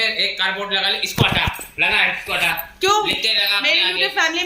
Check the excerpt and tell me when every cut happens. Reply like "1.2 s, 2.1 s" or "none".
none